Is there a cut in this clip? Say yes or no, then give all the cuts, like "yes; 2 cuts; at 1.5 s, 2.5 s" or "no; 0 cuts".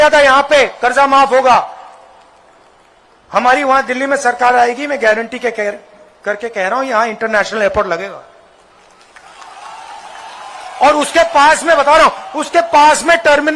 no; 0 cuts